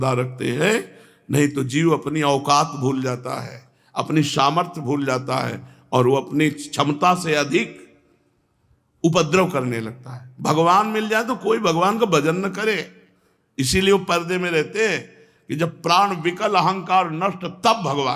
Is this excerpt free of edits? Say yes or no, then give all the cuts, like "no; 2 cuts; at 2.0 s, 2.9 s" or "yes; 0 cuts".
yes; 0 cuts